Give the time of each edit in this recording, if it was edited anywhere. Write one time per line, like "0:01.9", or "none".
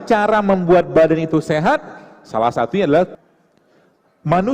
0:03.2